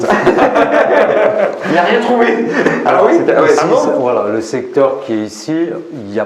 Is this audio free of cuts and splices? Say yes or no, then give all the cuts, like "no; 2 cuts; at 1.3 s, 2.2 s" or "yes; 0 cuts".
yes; 0 cuts